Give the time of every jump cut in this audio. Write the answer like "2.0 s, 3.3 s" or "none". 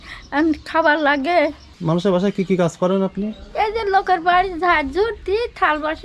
1.6 s